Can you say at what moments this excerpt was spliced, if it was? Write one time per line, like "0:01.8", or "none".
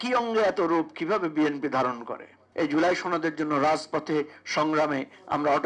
0:02.4